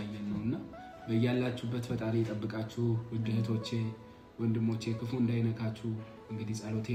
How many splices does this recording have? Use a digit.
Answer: 0